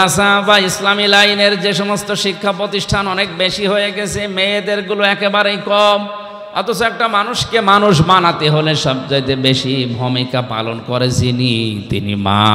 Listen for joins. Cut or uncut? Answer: uncut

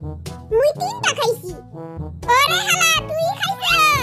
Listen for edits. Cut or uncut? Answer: uncut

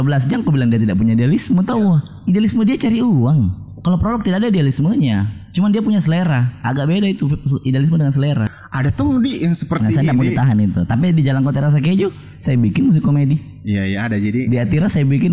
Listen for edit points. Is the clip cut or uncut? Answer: cut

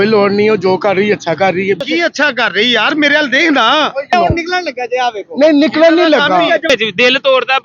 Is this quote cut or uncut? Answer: cut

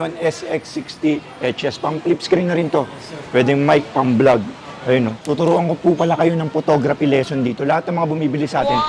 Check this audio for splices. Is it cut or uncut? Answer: cut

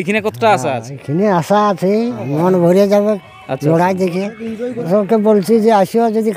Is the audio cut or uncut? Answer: cut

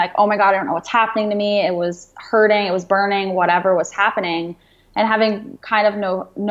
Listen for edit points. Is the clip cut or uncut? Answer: uncut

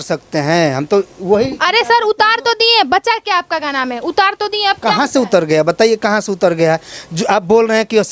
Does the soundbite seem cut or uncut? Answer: uncut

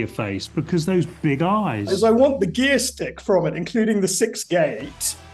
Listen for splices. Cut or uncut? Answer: cut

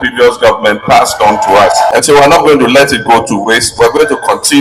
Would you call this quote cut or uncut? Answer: cut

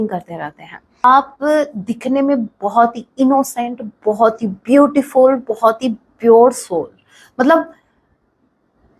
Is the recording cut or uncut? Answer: cut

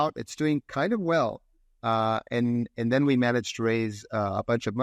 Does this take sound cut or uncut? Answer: uncut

